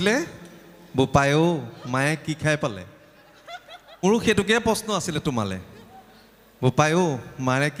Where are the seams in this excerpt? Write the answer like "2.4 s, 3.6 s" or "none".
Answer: 4.0 s

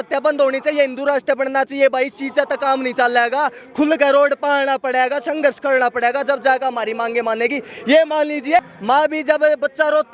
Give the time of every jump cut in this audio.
8.7 s

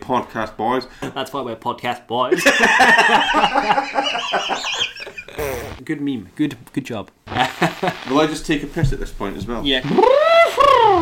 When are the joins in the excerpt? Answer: 1.1 s, 7.2 s

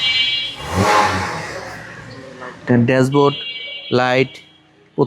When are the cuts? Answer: none

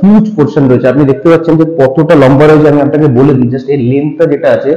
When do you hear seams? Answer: none

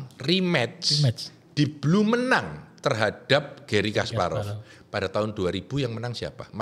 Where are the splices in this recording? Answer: none

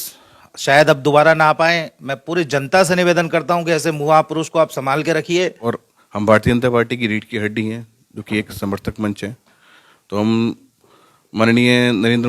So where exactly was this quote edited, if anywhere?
5.6 s

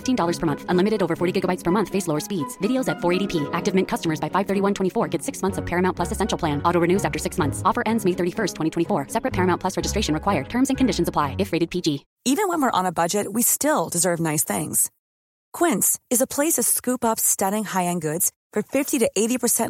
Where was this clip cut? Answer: 12.1 s

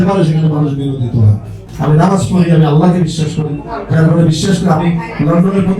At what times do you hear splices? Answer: 1.6 s

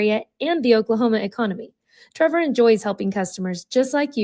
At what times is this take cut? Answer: none

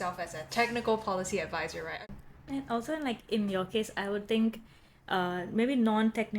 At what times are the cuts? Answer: 2.0 s

